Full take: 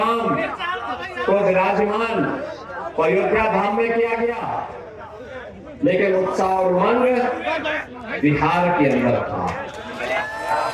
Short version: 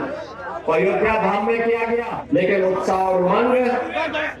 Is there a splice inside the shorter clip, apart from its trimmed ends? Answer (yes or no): yes